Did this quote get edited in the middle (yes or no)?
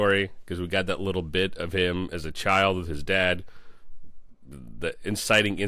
no